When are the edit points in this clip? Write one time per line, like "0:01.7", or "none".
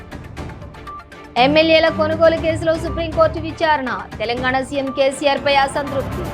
0:01.3

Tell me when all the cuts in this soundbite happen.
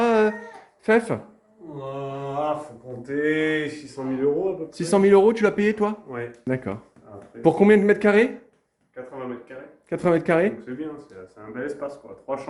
none

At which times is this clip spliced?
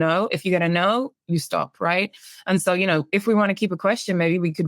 none

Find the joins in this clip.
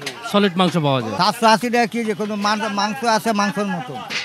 0:01.1

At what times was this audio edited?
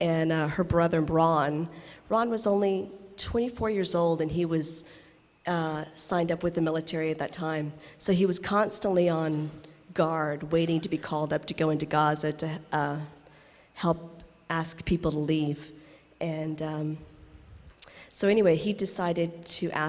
0:01.9

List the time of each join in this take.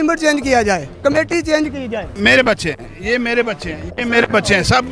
0:02.1

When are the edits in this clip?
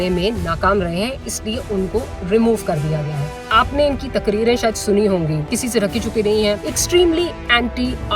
0:03.5
0:05.5
0:06.7

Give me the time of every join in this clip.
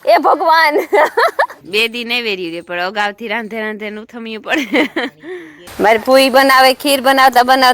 0:01.6
0:05.6

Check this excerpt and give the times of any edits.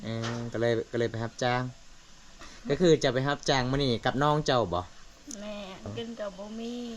0:02.5
0:05.9

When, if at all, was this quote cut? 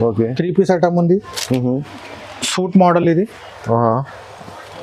none

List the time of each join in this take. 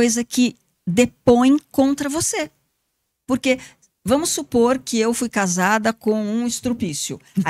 none

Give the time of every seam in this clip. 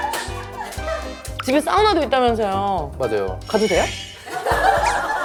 none

